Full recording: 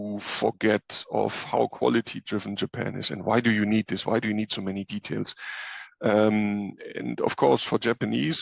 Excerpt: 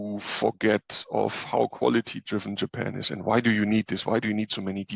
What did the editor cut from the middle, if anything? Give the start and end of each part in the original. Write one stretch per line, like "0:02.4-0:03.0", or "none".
none